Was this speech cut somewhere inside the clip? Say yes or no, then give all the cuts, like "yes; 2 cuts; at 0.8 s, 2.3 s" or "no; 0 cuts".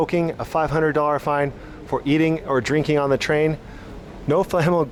no; 0 cuts